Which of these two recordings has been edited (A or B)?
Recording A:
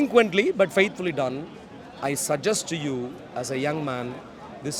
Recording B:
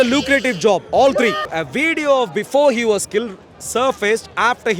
B